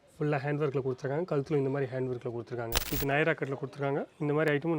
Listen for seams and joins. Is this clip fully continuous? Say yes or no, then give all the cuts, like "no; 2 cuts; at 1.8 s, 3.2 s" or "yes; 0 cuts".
no; 1 cut; at 2.8 s